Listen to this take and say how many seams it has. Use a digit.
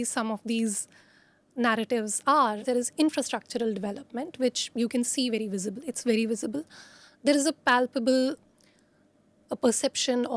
1